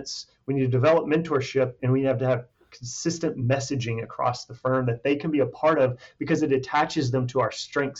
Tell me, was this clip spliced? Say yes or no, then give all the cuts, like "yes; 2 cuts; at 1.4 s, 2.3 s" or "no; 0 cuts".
no; 0 cuts